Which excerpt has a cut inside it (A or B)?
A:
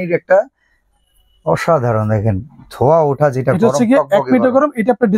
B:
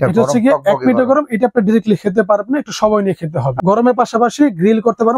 B